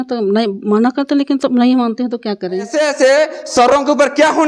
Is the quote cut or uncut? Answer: cut